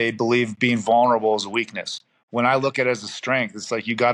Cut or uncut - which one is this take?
uncut